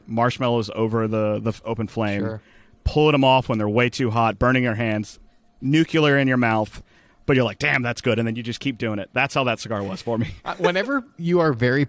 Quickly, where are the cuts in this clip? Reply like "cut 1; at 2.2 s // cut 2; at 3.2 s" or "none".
none